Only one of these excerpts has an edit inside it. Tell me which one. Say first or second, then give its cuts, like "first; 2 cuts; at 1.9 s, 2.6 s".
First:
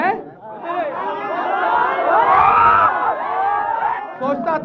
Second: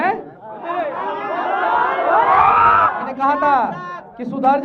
second; 1 cut; at 3.0 s